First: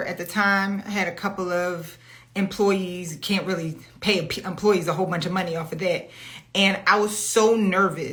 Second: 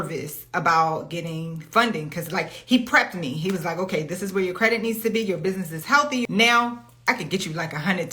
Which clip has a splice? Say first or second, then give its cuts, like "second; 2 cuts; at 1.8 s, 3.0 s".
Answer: second; 1 cut; at 6.2 s